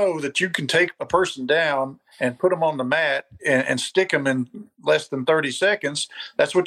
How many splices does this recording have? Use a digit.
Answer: 1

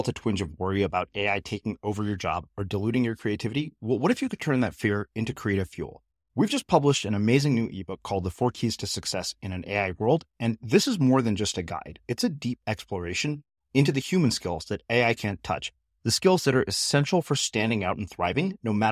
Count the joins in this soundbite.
0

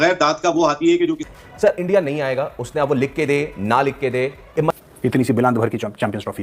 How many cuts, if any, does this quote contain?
2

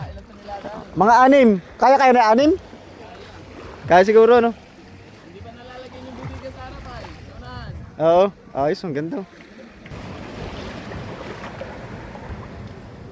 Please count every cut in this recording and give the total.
1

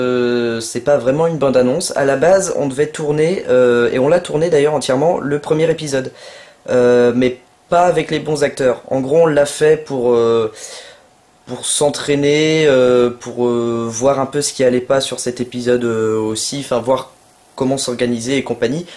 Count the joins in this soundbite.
1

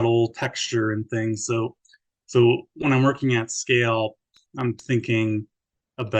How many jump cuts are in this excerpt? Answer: 0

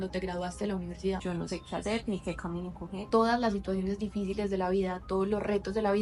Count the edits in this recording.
2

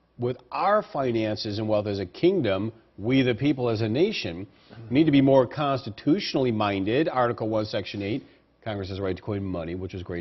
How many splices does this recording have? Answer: 1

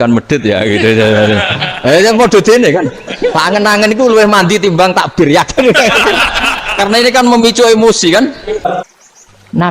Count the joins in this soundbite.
1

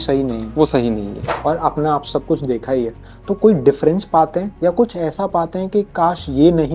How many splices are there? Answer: 1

